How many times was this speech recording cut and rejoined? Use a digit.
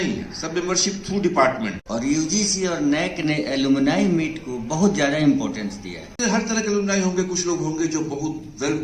2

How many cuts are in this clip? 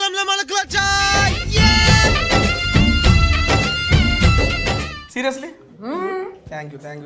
0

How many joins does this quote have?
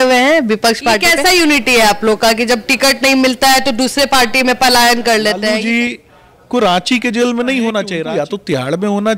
3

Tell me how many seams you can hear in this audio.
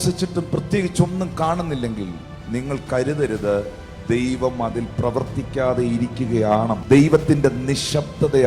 1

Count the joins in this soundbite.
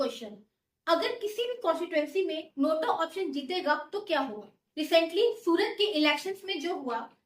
1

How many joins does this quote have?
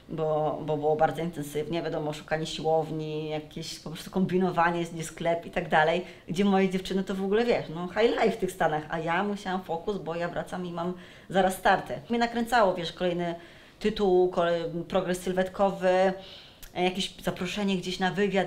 1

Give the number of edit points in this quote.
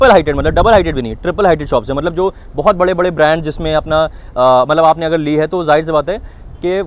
0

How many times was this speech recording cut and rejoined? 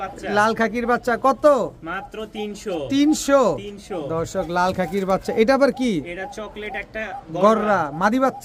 0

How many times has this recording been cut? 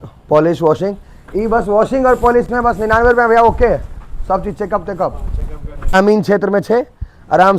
1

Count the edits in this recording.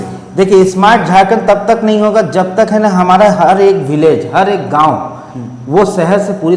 0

